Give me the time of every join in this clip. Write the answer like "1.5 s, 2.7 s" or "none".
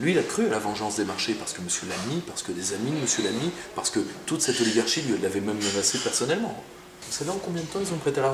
7.0 s